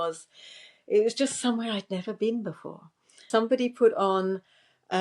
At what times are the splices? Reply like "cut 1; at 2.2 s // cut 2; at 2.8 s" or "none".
cut 1; at 3.3 s